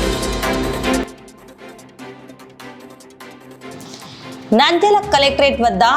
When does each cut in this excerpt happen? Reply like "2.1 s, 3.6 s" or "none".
1.0 s, 3.7 s